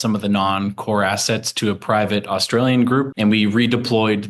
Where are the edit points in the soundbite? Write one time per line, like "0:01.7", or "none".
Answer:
0:03.1